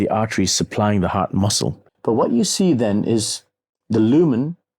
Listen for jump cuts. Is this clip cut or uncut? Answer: cut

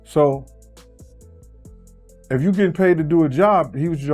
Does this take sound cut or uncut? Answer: uncut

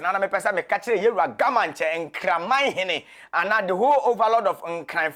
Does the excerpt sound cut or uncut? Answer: uncut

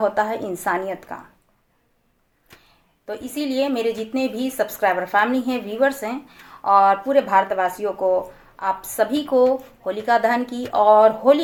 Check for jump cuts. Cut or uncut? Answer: uncut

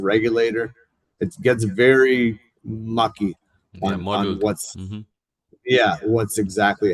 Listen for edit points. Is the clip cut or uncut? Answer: uncut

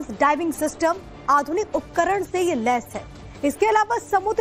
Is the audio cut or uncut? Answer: uncut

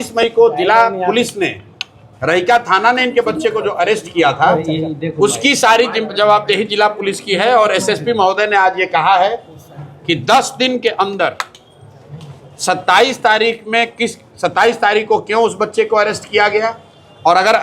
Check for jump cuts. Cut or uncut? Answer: uncut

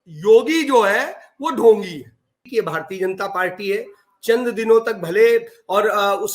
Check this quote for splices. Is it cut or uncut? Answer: cut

